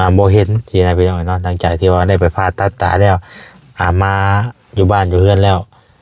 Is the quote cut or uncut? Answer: uncut